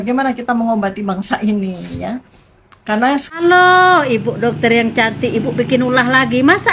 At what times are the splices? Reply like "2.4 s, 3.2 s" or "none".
none